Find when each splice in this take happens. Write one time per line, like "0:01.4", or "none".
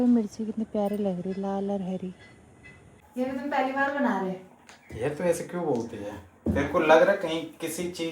0:03.0